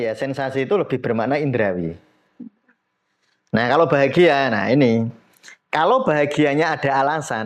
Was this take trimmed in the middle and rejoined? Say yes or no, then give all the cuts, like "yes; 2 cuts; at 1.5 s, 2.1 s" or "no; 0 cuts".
no; 0 cuts